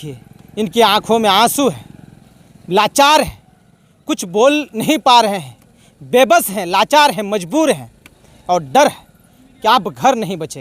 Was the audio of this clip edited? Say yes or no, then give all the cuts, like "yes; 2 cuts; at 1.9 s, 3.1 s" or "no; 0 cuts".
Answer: no; 0 cuts